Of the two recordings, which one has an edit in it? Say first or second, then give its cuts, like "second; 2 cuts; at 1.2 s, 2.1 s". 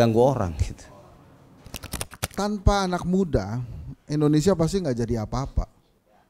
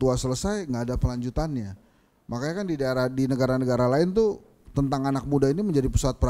first; 1 cut; at 1.9 s